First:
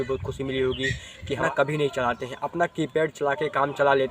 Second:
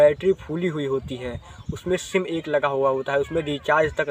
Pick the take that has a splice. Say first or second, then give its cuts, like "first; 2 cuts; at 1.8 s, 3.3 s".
first; 1 cut; at 1.4 s